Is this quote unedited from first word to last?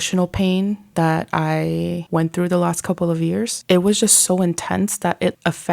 no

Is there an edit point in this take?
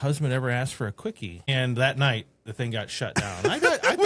yes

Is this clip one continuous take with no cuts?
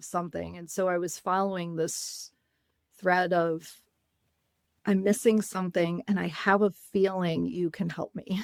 yes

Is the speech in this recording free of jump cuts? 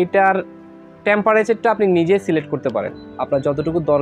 no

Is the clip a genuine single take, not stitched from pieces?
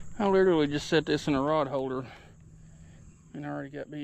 yes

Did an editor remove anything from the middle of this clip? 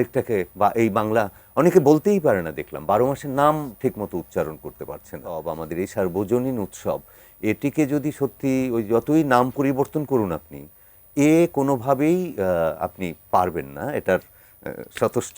yes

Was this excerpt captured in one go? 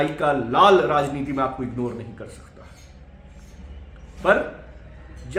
yes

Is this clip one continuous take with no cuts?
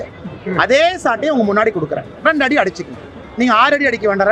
yes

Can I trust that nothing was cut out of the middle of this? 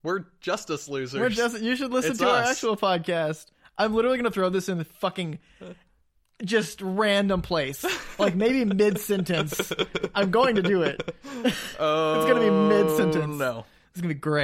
yes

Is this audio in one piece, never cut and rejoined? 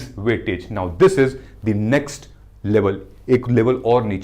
yes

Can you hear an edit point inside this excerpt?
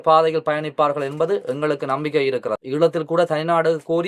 yes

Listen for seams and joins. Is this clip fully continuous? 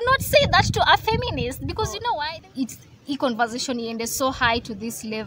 no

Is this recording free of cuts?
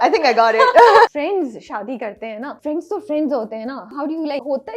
no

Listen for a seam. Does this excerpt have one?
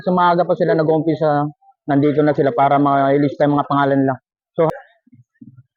yes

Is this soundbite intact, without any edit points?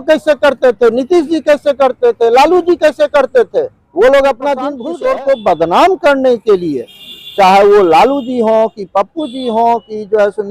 no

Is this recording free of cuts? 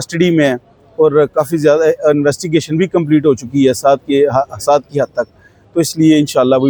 yes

